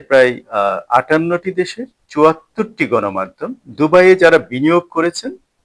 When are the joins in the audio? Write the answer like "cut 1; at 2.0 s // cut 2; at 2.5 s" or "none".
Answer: cut 1; at 3.6 s